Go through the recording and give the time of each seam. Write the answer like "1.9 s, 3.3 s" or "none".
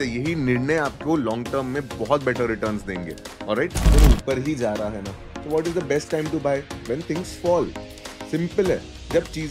4.0 s